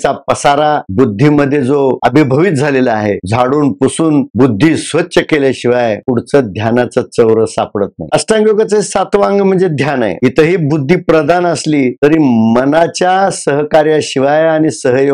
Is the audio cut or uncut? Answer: cut